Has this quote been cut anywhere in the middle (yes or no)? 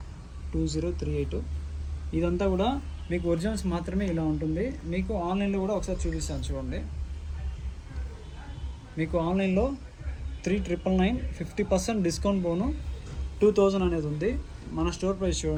no